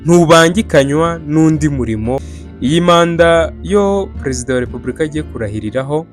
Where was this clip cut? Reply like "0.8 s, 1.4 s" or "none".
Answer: 2.4 s